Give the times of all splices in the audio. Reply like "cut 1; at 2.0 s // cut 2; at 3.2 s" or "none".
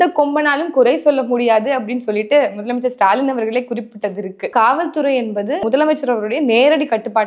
cut 1; at 4.5 s // cut 2; at 5.6 s